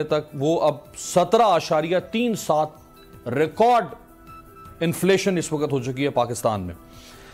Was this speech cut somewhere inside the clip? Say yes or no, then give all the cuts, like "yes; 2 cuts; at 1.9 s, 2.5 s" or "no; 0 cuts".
no; 0 cuts